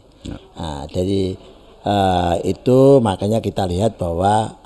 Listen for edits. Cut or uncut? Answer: uncut